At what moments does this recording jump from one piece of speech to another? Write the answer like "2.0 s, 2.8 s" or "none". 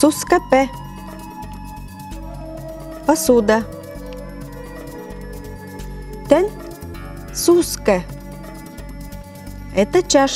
none